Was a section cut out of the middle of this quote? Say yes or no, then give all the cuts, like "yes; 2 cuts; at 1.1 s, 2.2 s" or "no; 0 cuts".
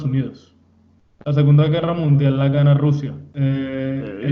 yes; 1 cut; at 3.2 s